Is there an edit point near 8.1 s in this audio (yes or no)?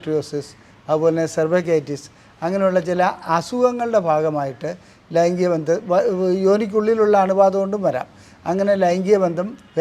no